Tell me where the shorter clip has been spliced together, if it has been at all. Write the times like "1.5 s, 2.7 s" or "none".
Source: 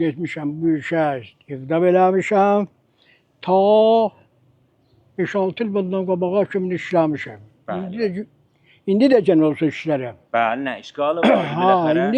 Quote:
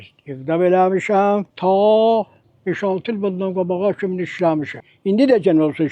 1.5 s, 2.4 s, 4.8 s